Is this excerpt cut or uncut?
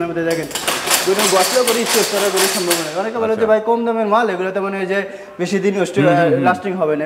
uncut